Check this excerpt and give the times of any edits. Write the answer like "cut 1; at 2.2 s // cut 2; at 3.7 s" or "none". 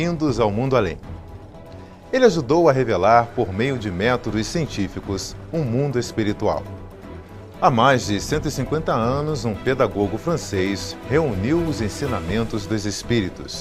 cut 1; at 2.2 s